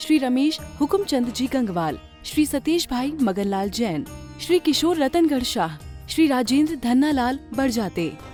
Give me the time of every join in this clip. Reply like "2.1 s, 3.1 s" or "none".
none